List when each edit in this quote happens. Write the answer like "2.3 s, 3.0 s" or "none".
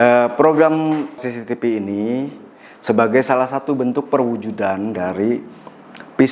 1.2 s

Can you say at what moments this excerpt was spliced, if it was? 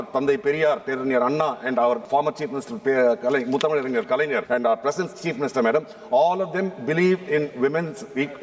0.9 s, 2.0 s, 4.4 s

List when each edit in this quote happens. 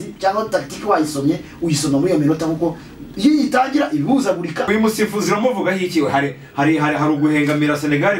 4.6 s

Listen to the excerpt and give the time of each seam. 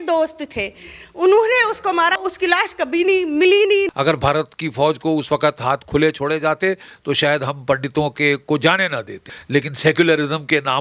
2.2 s, 3.9 s, 9.4 s

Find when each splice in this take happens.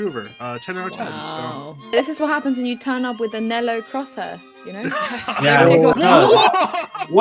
5.9 s

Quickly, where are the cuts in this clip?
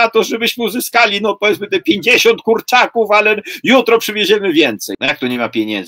4.9 s

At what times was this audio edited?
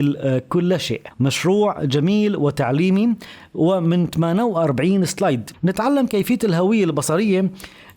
1.0 s, 5.5 s

